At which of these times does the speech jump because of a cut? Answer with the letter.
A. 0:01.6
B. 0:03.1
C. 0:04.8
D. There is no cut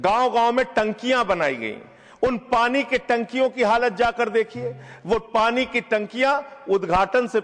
D